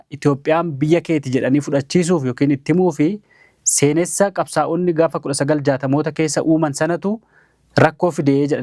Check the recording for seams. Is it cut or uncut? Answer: uncut